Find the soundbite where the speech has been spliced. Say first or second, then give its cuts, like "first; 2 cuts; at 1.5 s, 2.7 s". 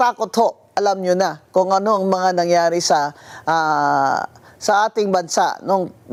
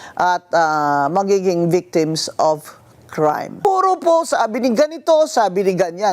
second; 1 cut; at 3.6 s